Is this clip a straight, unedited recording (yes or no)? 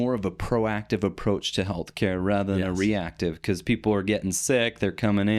yes